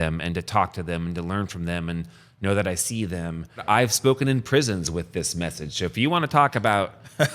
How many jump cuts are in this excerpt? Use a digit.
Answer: 1